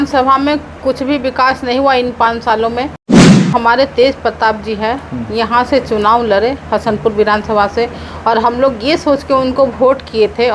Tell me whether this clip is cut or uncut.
uncut